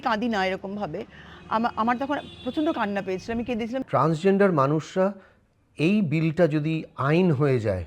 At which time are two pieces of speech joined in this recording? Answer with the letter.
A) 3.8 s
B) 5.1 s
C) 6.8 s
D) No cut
A